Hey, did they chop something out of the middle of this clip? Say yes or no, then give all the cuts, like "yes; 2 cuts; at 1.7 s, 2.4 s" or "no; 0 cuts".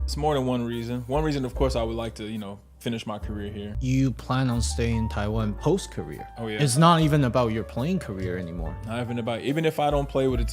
yes; 1 cut; at 3.7 s